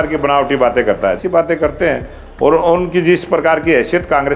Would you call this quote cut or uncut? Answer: cut